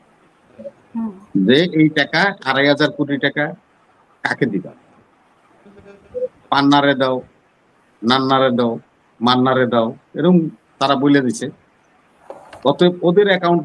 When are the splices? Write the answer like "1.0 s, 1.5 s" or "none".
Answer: none